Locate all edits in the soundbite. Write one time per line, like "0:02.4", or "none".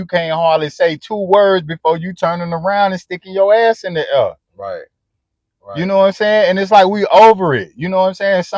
none